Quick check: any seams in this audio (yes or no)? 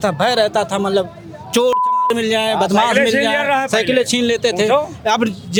no